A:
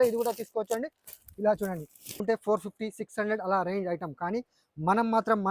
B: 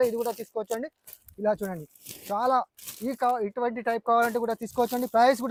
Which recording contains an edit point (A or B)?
A